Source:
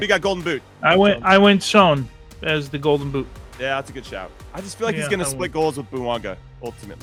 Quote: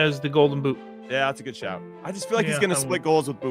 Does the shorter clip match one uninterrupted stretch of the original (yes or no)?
yes